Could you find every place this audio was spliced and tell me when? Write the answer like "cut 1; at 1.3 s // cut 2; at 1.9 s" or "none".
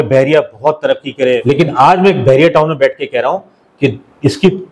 cut 1; at 1.4 s